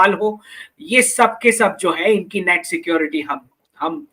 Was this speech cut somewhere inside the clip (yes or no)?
no